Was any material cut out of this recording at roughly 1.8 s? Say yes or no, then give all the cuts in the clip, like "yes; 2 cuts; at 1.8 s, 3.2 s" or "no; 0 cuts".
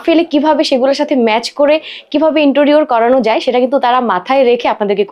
no; 0 cuts